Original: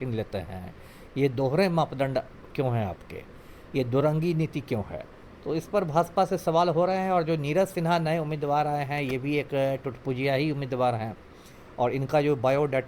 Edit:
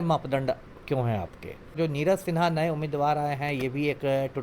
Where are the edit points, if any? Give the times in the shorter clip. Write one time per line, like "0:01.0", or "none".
0:01.8